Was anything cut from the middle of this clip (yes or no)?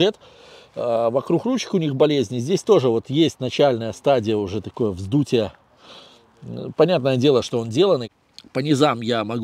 yes